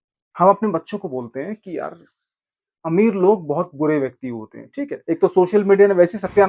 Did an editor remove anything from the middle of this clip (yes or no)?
yes